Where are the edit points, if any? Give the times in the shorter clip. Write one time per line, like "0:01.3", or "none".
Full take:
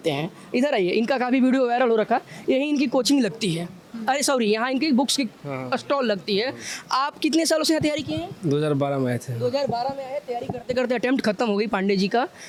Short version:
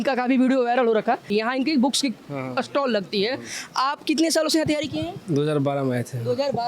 0:01.3